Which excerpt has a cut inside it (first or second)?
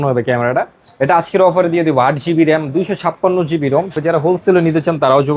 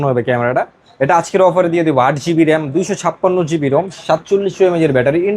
first